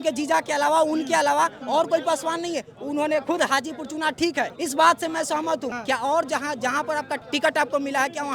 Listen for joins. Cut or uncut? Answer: cut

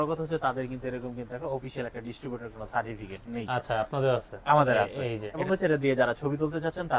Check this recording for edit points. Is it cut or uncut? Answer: cut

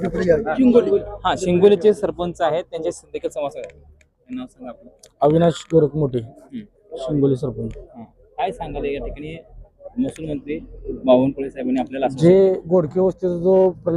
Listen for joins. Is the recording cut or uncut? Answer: uncut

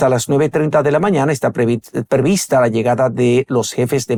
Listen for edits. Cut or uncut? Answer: uncut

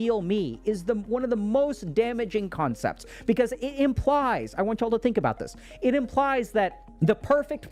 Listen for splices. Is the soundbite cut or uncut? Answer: uncut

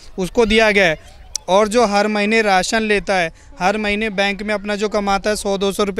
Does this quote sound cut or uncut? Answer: uncut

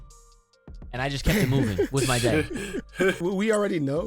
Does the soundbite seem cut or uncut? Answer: cut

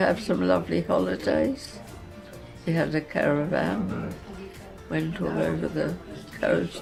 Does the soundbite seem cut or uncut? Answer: uncut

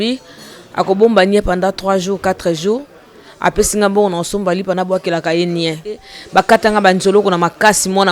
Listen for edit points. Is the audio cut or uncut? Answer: cut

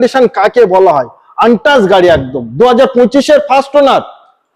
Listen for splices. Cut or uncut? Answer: uncut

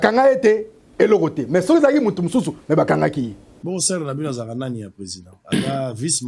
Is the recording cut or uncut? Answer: cut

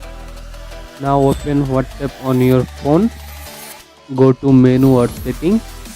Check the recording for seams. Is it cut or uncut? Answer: cut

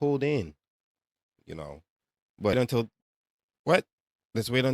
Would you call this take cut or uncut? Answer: cut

